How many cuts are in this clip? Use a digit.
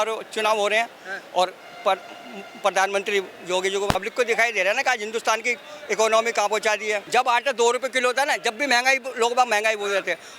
2